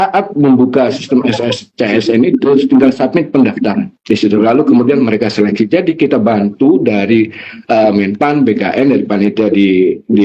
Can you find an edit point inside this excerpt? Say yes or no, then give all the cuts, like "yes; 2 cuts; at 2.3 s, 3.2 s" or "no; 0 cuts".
no; 0 cuts